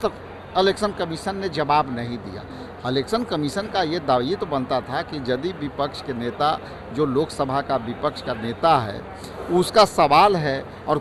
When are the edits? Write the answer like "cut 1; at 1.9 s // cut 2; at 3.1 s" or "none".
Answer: none